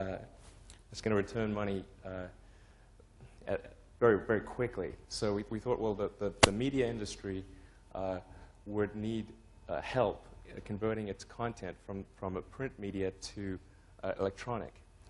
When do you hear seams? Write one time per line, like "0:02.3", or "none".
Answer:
none